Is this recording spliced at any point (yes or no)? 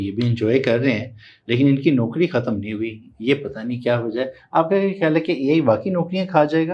no